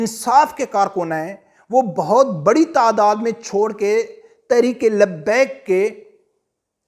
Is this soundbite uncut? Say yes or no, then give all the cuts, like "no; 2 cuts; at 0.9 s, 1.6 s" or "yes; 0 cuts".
yes; 0 cuts